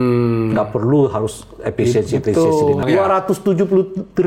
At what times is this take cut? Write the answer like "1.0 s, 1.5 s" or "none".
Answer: 2.8 s